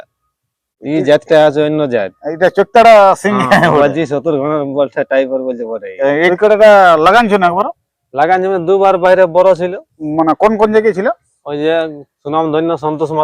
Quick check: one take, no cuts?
no; 1 cut; at 6.3 s

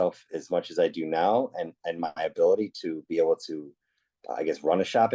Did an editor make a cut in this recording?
no; 0 cuts

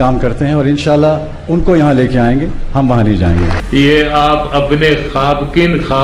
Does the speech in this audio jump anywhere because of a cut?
yes; 1 cut; at 3.6 s

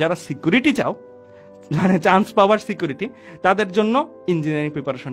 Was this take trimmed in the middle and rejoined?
no; 0 cuts

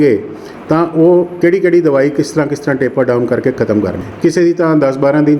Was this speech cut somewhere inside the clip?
yes; 1 cut; at 4.0 s

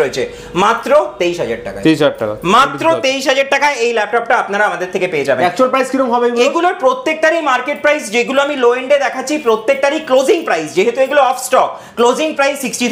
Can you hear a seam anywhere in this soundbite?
no; 0 cuts

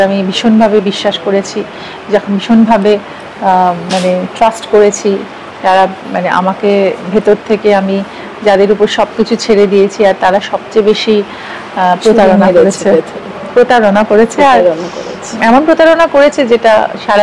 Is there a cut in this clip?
no; 0 cuts

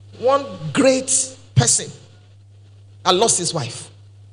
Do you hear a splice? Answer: no; 0 cuts

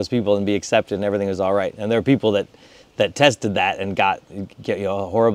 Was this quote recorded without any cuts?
yes; 0 cuts

